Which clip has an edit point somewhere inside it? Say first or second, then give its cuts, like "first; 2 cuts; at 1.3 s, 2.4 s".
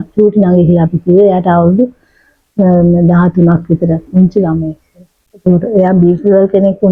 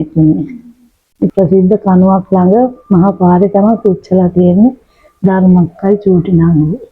second; 1 cut; at 1.3 s